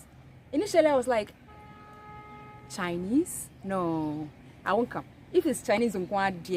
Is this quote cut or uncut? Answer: uncut